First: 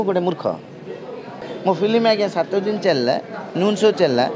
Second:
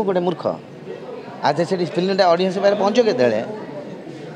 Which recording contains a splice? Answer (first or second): first